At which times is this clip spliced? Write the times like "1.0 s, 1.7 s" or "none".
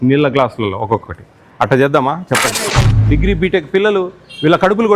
2.8 s